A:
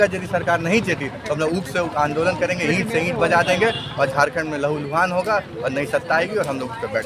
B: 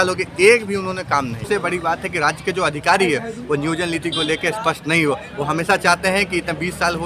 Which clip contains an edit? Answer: B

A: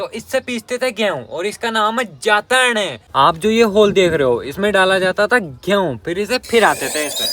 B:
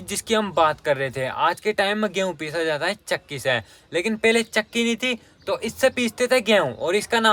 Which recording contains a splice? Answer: A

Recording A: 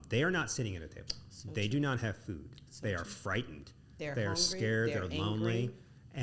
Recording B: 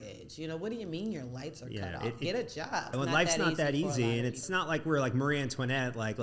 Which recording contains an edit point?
B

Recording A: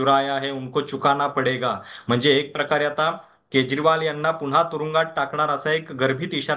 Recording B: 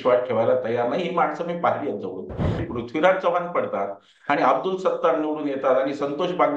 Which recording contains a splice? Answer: B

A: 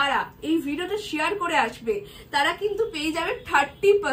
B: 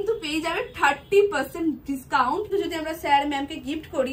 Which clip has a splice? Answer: B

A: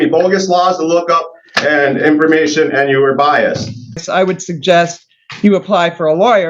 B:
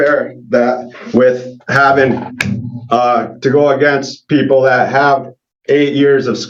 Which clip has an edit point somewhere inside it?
A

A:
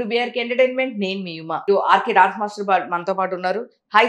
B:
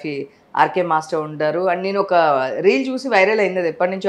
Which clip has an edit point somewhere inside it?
A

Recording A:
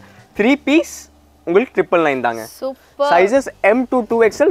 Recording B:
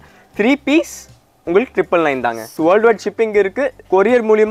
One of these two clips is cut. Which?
B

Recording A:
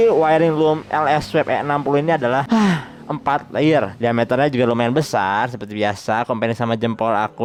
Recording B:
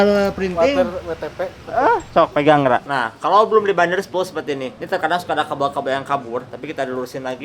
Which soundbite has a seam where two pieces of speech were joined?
B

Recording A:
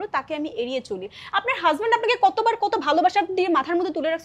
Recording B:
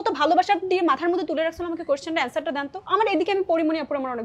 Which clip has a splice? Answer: B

